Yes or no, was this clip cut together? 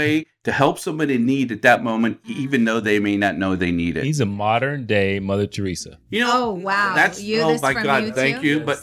no